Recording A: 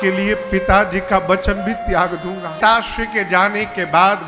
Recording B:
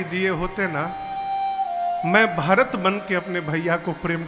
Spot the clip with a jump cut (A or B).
A